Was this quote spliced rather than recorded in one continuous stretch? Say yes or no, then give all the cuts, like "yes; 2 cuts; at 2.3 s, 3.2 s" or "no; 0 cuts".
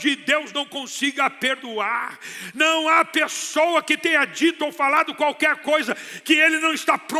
no; 0 cuts